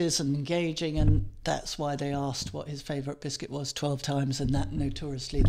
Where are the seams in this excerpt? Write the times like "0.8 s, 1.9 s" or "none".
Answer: none